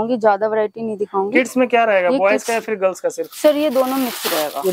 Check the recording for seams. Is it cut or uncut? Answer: uncut